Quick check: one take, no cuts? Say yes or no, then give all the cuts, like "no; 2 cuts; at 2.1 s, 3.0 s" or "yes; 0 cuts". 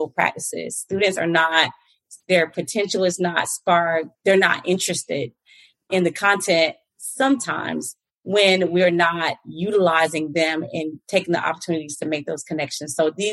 no; 1 cut; at 4.1 s